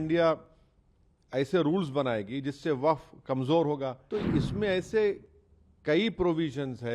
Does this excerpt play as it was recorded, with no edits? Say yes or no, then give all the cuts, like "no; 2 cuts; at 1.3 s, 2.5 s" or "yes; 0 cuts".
no; 1 cut; at 4.0 s